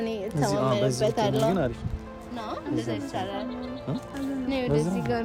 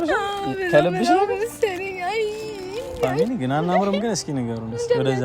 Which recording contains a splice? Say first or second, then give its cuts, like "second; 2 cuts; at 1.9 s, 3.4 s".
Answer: second; 1 cut; at 2.9 s